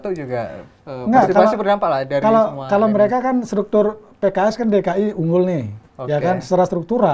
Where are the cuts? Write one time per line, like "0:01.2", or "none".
none